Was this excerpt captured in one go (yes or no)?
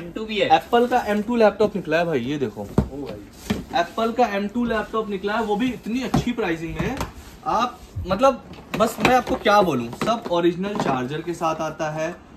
yes